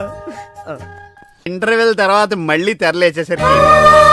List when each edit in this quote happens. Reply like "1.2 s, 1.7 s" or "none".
1.5 s